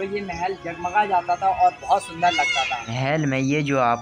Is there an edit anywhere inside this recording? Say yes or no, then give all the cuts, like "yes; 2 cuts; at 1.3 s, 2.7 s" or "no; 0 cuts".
yes; 1 cut; at 2.9 s